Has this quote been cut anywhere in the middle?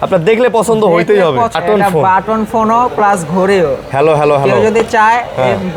yes; 1 cut; at 1.5 s

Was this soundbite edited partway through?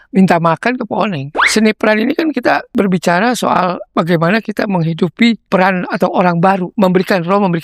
yes; 5 cuts; at 1.3 s, 2.7 s, 3.8 s, 5.4 s, 6.7 s

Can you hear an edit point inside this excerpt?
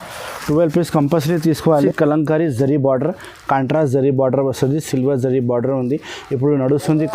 yes; 1 cut; at 1.7 s

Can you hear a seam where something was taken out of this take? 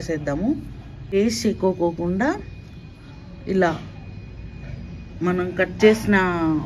yes; 1 cut; at 1.1 s

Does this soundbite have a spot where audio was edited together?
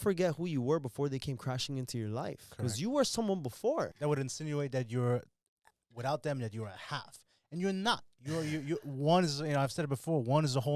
yes; 1 cut; at 3.9 s

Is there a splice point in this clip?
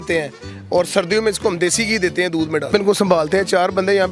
yes; 1 cut; at 2.7 s

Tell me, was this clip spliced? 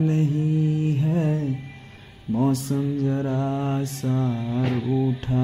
no; 0 cuts

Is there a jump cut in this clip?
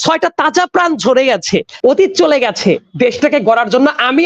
yes; 1 cut; at 1.7 s

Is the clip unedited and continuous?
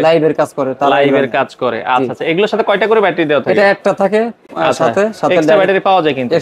yes; 0 cuts

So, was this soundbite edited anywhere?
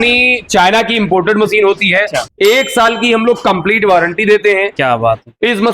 yes; 1 cut; at 2.2 s

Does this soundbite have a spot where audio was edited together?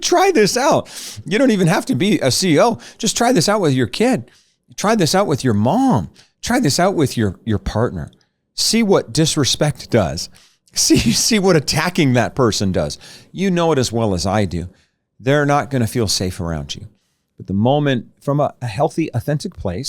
yes; 1 cut; at 18.2 s

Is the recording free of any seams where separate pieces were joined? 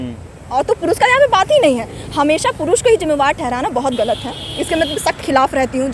yes; 0 cuts

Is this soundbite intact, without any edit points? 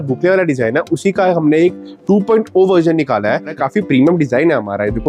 no; 1 cut; at 3.5 s

